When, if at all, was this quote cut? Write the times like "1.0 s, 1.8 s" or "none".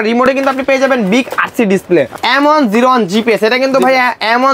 2.1 s

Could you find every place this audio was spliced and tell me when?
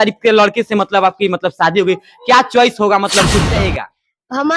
3.5 s

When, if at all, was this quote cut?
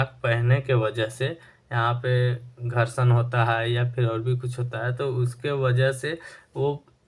none

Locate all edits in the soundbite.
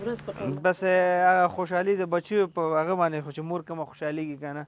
none

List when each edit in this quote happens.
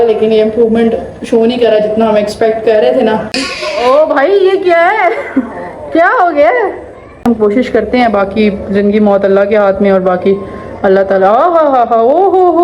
3.4 s, 7.2 s

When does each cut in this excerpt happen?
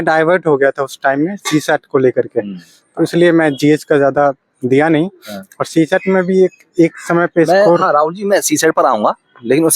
none

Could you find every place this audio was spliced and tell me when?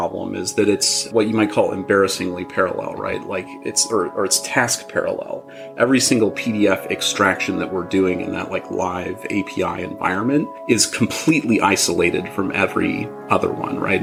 none

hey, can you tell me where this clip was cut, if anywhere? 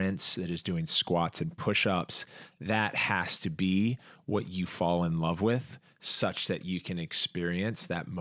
none

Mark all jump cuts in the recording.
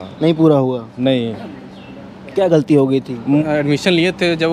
3.4 s

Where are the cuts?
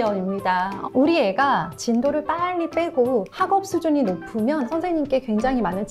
0.8 s, 1.7 s, 4.7 s

